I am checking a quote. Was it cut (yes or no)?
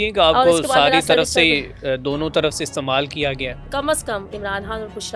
yes